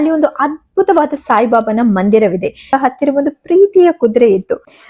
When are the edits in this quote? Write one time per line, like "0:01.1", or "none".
0:02.8